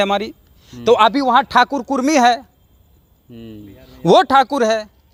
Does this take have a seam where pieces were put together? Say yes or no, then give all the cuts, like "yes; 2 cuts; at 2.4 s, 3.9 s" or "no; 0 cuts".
no; 0 cuts